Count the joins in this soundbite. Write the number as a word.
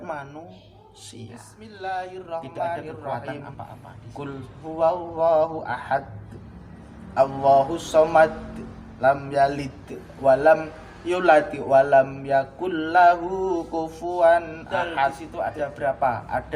two